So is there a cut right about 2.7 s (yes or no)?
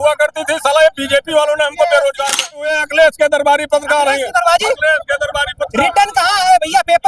yes